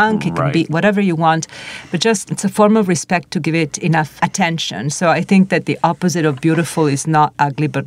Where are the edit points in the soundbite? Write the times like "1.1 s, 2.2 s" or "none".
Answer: 2.2 s, 4.1 s